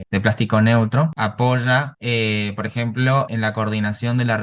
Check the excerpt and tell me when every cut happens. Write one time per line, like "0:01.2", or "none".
0:01.2
0:03.3